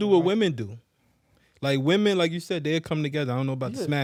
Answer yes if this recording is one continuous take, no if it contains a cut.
yes